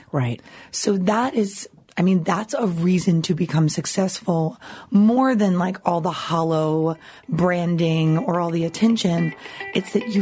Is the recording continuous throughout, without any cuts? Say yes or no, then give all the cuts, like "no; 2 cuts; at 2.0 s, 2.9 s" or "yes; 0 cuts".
yes; 0 cuts